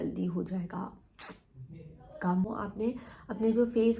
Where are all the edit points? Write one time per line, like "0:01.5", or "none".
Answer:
0:02.5